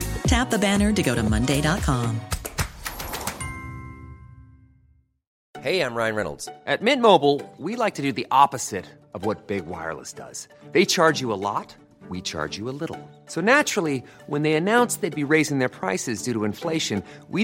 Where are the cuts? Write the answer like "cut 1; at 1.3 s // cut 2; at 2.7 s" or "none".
none